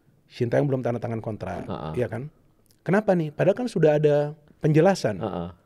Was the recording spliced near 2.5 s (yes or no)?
no